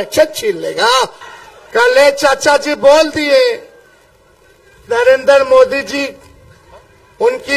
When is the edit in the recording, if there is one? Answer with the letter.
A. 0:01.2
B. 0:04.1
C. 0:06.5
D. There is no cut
A